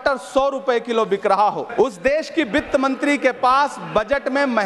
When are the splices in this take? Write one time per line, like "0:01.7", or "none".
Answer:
0:01.6